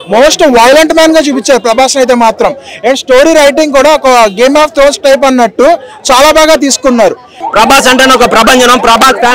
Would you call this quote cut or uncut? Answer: cut